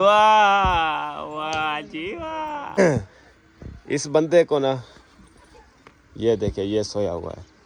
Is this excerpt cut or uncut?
cut